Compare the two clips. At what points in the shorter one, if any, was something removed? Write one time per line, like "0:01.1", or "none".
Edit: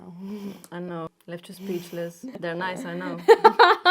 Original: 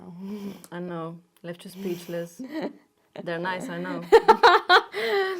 0:01.2
0:02.2